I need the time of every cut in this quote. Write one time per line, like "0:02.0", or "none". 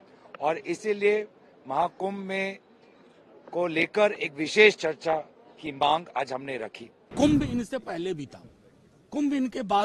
0:07.1